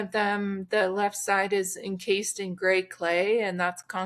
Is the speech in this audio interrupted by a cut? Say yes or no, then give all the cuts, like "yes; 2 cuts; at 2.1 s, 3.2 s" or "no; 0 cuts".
no; 0 cuts